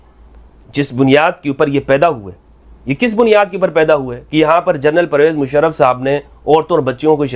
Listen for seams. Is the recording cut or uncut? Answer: uncut